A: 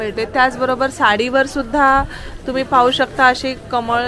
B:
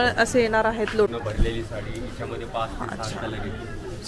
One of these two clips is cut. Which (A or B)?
B